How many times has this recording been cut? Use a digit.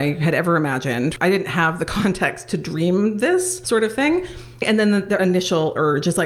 3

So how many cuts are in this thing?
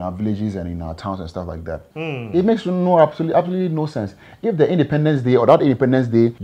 1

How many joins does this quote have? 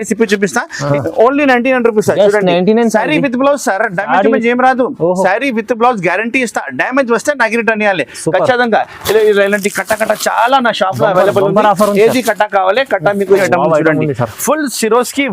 2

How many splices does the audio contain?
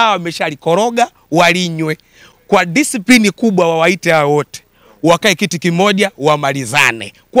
0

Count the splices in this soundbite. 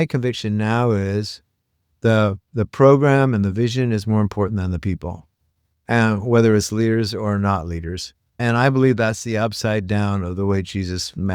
1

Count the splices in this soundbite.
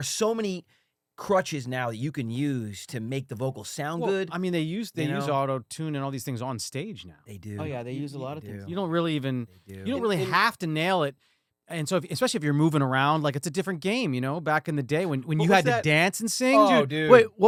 0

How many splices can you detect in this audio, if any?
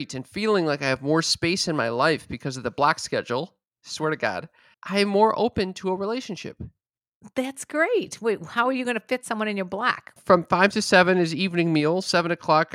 2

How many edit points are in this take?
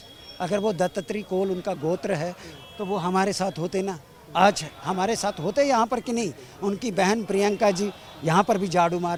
0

